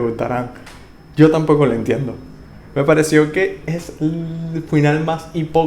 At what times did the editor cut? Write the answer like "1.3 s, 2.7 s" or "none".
none